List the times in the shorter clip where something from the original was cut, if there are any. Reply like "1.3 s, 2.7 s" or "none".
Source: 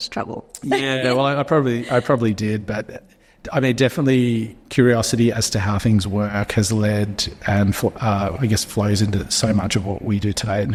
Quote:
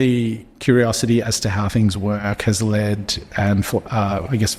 none